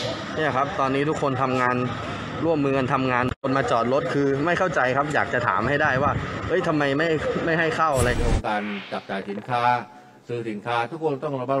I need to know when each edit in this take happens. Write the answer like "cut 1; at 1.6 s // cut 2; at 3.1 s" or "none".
cut 1; at 8.1 s

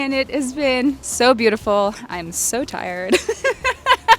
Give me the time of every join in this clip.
cut 1; at 1.1 s

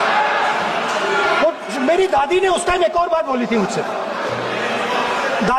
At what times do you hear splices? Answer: none

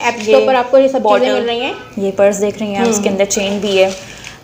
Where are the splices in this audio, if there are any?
none

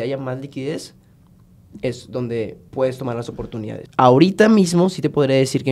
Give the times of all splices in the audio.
cut 1; at 3.8 s

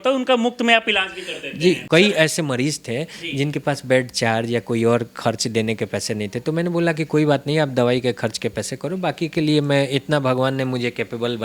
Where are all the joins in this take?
cut 1; at 1.8 s

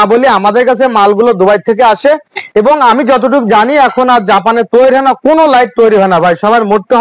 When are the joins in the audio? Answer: none

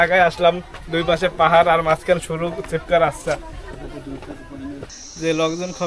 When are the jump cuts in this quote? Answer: cut 1; at 4.9 s

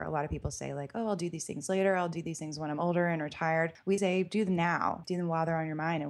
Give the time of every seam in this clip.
cut 1; at 3.8 s // cut 2; at 5.0 s

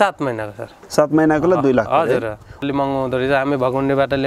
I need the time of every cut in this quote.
cut 1; at 2.6 s

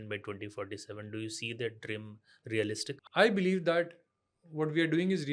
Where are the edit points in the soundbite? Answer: cut 1; at 3.0 s

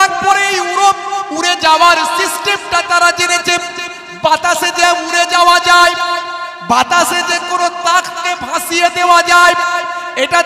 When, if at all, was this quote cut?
none

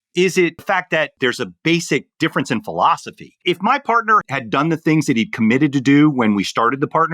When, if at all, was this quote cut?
cut 1; at 1.1 s // cut 2; at 4.2 s

